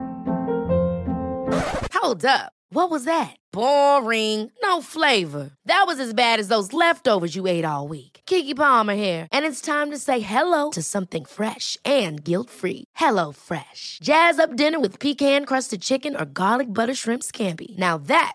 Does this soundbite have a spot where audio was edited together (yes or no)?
no